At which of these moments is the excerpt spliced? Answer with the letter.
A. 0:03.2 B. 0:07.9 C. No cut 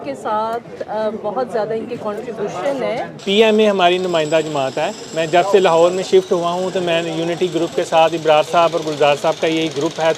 A